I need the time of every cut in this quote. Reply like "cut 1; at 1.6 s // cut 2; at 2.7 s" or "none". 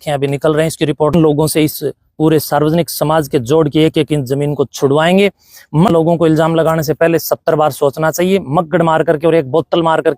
cut 1; at 1.1 s // cut 2; at 5.9 s